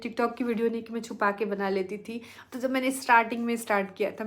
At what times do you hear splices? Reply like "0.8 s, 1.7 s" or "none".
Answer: none